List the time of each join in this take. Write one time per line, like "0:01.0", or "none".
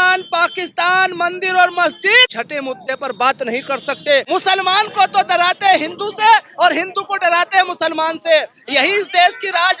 0:02.4
0:04.3